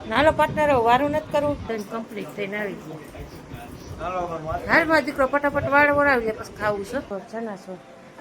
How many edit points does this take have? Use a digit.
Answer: 2